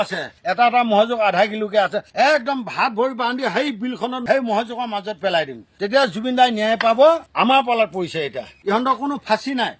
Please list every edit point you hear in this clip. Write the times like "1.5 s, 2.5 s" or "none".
7.2 s, 8.5 s